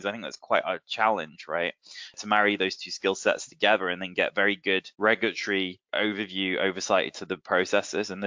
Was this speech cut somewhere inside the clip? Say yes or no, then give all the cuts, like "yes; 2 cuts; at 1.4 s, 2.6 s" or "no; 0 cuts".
yes; 3 cuts; at 2.2 s, 4.9 s, 5.8 s